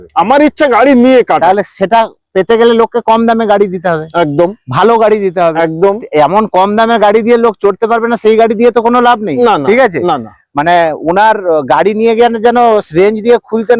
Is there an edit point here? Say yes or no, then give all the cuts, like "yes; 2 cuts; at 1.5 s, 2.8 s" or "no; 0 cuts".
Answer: no; 0 cuts